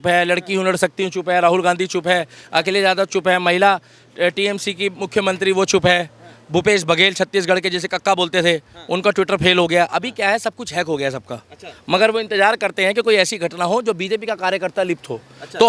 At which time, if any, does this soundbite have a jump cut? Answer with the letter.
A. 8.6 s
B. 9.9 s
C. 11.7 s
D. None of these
D